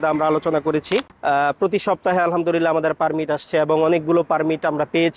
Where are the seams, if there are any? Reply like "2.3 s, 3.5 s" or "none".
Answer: 1.1 s